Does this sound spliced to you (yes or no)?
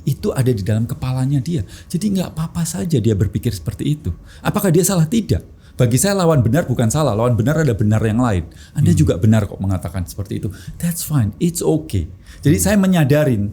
no